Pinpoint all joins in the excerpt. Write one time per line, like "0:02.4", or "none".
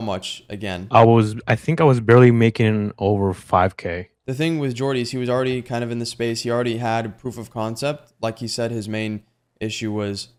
none